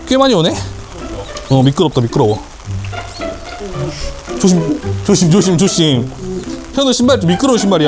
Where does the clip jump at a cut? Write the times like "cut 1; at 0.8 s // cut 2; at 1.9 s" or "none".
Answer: cut 1; at 2.6 s // cut 2; at 3.6 s